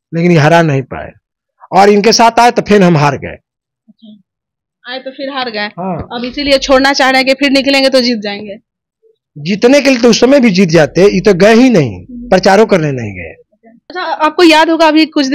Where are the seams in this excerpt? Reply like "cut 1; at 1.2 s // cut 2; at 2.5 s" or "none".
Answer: none